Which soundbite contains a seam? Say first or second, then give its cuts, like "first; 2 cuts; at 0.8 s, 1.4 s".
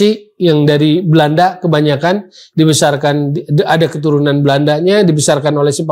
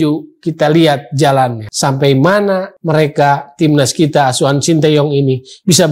second; 2 cuts; at 1.7 s, 2.7 s